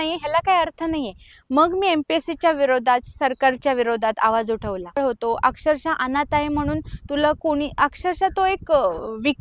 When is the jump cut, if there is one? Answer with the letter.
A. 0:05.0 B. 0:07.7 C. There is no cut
A